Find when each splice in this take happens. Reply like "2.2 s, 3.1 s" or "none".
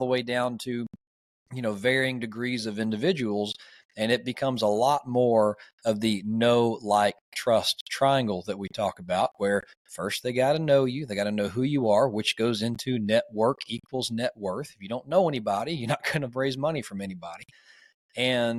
none